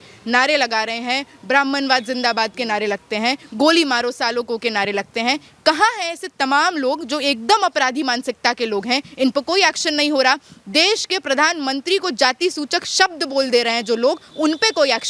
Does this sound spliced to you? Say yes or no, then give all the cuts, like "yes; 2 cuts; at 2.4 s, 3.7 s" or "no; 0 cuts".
no; 0 cuts